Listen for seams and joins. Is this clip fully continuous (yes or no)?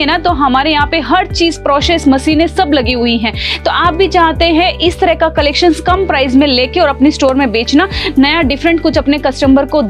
yes